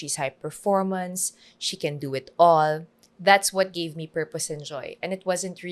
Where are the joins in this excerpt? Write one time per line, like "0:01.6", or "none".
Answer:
none